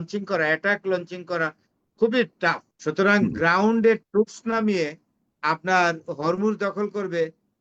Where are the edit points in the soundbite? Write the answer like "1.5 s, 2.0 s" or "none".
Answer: 2.7 s